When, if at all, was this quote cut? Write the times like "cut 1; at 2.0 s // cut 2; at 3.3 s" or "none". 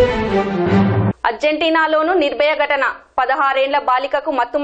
cut 1; at 1.0 s